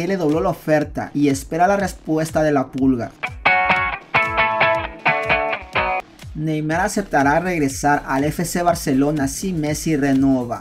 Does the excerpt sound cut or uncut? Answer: cut